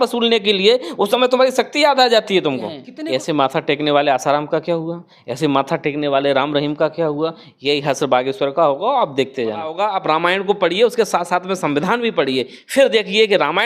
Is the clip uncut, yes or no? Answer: no